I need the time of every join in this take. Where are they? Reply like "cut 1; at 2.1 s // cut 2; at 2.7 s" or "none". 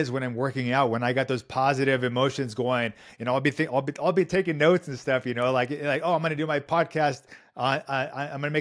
none